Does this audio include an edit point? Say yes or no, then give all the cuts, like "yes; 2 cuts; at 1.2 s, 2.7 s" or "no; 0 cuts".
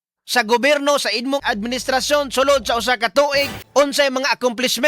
yes; 2 cuts; at 1.4 s, 3.6 s